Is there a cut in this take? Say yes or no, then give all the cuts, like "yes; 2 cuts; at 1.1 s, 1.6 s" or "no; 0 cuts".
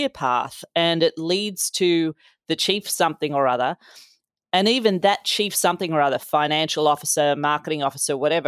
no; 0 cuts